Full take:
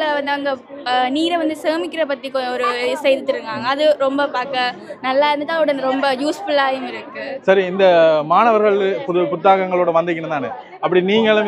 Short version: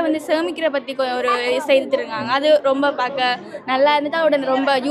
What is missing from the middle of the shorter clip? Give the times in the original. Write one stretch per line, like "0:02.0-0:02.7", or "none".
none